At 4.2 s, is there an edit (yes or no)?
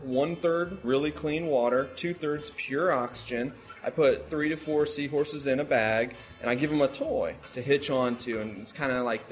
yes